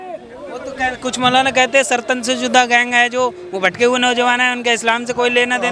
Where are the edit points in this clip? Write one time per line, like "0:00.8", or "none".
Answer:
none